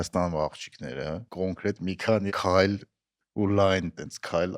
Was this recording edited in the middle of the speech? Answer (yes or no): yes